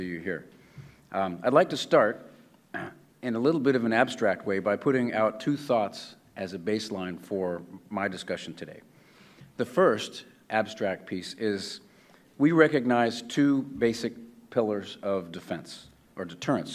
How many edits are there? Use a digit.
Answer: 1